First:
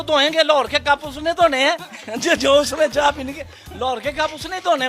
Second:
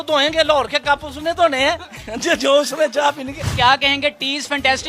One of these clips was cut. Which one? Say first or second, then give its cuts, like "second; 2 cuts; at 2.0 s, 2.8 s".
second; 1 cut; at 3.4 s